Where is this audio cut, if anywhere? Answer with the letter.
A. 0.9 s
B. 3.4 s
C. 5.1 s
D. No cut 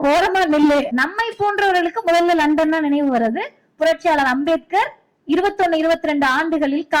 A